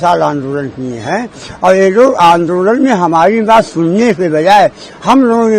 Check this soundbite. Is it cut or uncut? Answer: uncut